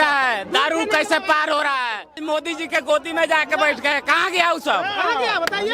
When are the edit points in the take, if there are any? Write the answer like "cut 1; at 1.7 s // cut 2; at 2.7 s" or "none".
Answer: cut 1; at 2.2 s